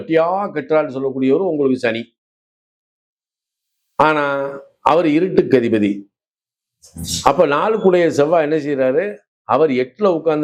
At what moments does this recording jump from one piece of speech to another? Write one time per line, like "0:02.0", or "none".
none